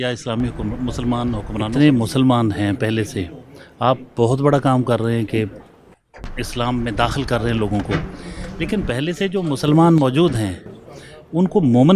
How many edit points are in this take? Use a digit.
1